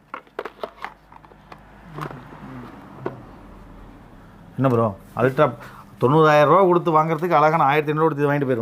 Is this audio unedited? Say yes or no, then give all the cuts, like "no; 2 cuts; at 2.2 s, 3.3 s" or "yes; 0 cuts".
yes; 0 cuts